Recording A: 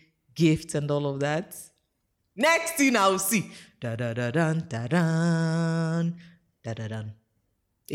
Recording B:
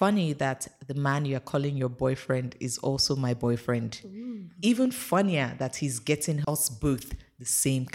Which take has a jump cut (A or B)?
B